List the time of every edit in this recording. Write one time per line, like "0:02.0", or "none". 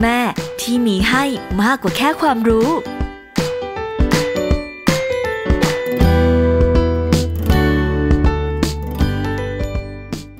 none